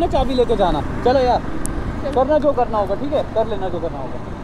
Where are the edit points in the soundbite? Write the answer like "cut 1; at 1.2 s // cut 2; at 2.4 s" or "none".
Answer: none